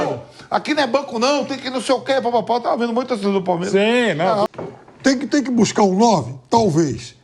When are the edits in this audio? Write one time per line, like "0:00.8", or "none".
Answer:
0:04.5